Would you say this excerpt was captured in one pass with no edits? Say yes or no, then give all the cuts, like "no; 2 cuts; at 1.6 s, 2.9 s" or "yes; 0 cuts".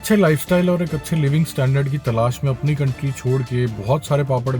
yes; 0 cuts